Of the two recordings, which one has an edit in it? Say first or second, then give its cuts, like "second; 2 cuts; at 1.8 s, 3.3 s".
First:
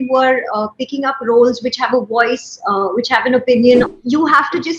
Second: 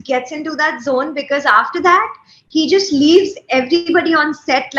first; 1 cut; at 3.9 s